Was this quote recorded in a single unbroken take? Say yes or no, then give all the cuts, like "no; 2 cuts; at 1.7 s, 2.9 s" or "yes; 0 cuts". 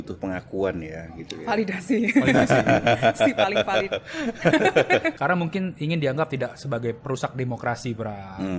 yes; 0 cuts